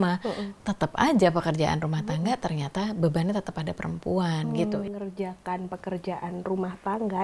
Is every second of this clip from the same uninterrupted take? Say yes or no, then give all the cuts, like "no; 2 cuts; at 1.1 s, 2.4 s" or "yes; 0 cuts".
no; 1 cut; at 4.7 s